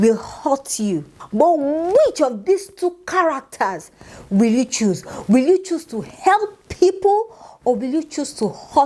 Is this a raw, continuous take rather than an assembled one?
no; 1 cut; at 1.2 s

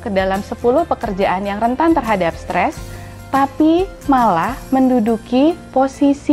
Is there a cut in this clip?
no; 0 cuts

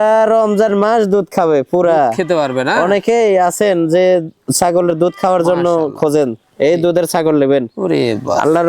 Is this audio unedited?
yes; 0 cuts

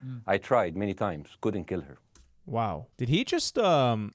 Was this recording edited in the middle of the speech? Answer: no; 0 cuts

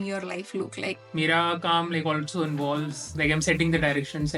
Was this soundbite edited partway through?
yes; 2 cuts; at 0.9 s, 3.1 s

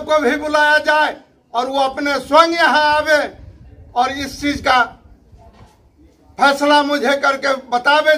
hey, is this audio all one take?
yes; 0 cuts

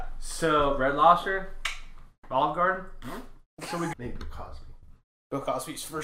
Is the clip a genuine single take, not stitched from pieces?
no; 1 cut; at 3.9 s

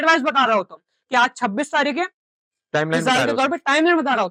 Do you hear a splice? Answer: no; 0 cuts

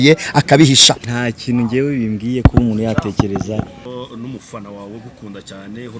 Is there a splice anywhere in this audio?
yes; 2 cuts; at 1.0 s, 3.9 s

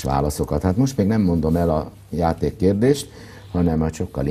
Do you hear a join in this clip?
yes; 1 cut; at 1.9 s

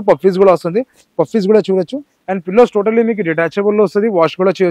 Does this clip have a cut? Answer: no; 0 cuts

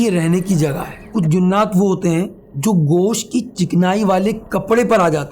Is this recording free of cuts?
no; 2 cuts; at 1.0 s, 2.4 s

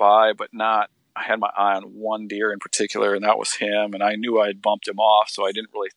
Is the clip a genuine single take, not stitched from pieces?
yes; 0 cuts

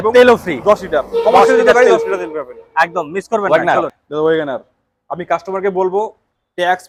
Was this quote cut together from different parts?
no; 0 cuts

